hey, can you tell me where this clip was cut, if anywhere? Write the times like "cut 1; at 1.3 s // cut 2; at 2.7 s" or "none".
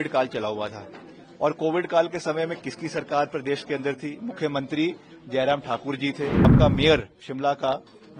cut 1; at 6.5 s